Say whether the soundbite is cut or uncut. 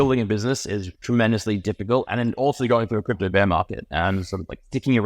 cut